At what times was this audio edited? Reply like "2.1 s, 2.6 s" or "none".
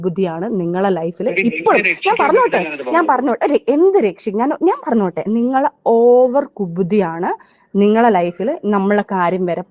none